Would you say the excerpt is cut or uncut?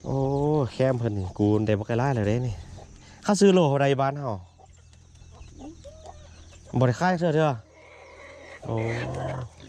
uncut